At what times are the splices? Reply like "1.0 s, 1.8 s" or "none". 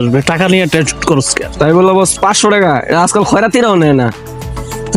none